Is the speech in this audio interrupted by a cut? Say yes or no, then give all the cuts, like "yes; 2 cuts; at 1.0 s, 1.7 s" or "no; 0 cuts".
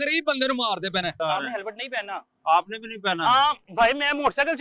yes; 1 cut; at 1.2 s